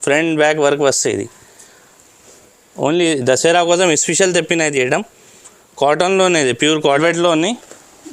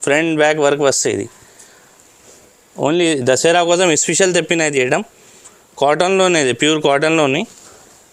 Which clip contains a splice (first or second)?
first